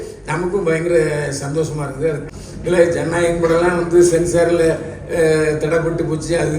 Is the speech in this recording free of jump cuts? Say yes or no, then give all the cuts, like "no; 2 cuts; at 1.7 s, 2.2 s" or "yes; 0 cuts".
no; 1 cut; at 2.3 s